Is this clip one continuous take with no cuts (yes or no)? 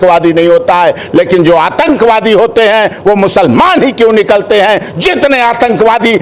yes